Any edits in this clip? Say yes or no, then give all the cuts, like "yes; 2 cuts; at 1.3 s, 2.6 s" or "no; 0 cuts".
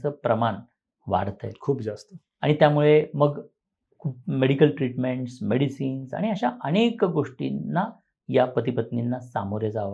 no; 0 cuts